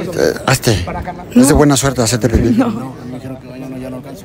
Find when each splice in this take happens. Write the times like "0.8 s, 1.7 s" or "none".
none